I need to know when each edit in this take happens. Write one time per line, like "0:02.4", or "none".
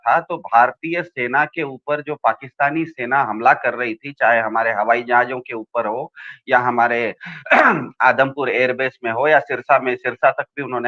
none